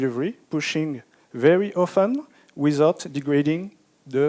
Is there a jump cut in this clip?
no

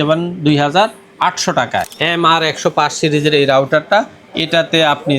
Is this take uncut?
no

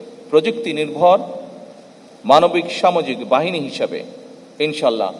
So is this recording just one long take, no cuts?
yes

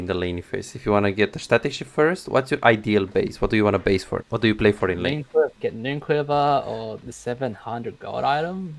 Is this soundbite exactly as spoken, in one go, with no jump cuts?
no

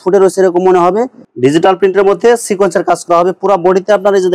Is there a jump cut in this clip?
yes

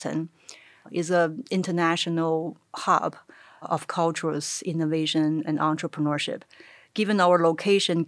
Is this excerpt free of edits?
yes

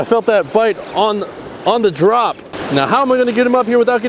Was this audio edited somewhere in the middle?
yes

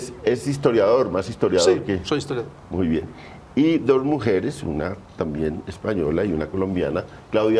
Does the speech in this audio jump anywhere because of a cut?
yes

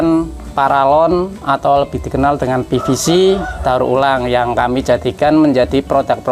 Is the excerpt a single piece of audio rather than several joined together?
yes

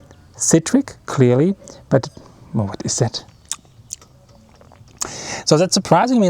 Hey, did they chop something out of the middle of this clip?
yes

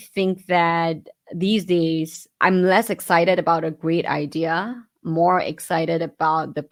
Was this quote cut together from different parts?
no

